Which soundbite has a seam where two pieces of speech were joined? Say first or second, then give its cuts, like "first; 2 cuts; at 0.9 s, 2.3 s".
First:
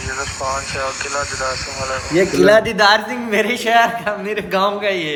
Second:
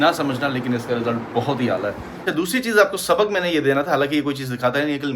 second; 1 cut; at 2.1 s